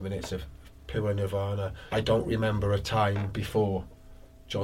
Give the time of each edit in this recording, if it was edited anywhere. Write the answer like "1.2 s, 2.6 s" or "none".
1.8 s